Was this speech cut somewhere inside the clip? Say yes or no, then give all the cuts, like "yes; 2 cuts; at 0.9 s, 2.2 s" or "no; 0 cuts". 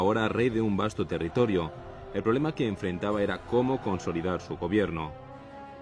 no; 0 cuts